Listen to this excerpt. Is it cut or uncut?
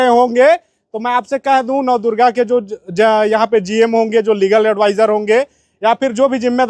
uncut